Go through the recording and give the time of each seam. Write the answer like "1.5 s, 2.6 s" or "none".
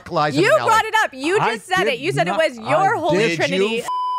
1.1 s